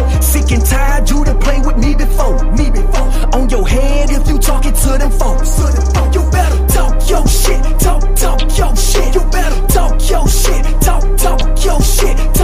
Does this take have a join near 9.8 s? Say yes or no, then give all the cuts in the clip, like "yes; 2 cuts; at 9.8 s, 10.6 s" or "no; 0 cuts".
no; 1 cut; at 11.5 s